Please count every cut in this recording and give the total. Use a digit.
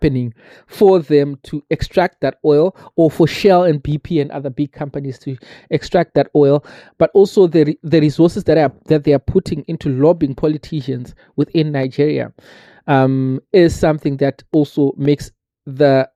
0